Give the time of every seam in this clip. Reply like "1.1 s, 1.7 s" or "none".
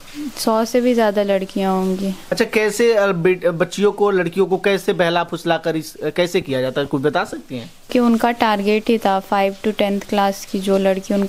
2.2 s, 7.9 s